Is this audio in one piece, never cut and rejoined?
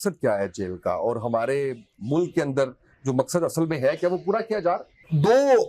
yes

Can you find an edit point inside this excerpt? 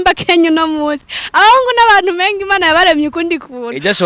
no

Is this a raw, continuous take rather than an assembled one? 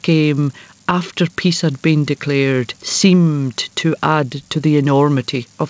no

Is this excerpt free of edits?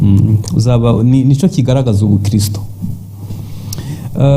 yes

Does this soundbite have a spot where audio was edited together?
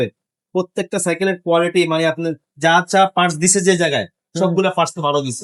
no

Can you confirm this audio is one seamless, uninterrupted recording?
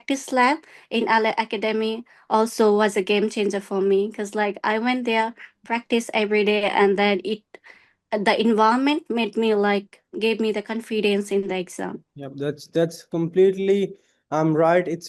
yes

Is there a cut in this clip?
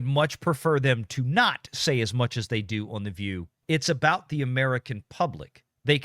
yes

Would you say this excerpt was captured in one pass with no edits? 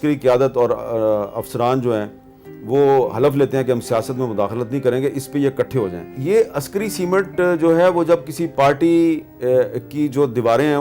no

